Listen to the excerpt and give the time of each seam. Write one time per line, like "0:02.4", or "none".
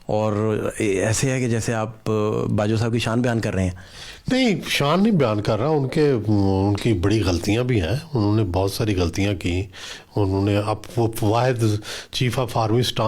none